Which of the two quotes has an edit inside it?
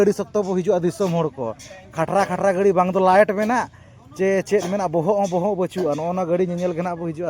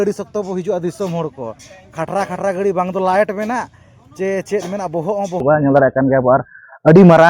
second; 1 cut; at 5.4 s

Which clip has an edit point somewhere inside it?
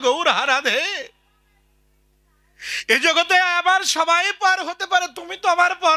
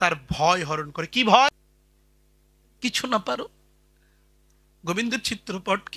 second; 1 cut; at 1.5 s

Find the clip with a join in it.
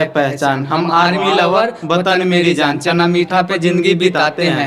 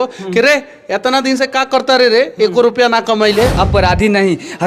second; 1 cut; at 3.5 s

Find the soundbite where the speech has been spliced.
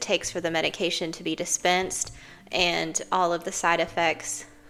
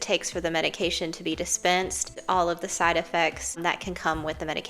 second; 2 cuts; at 2.1 s, 3.6 s

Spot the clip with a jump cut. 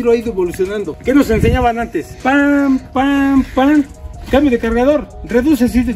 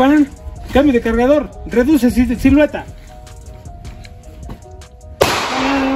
first; 2 cuts; at 0.9 s, 2.1 s

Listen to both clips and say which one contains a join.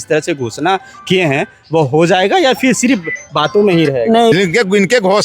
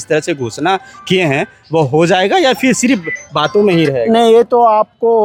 first; 1 cut; at 4.3 s

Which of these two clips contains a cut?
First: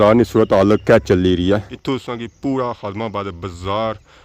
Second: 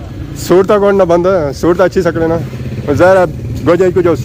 first; 1 cut; at 1.7 s

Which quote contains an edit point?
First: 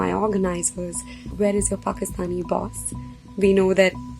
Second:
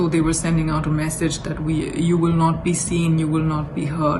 first; 1 cut; at 1.3 s

